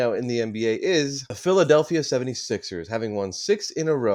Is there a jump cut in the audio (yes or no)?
yes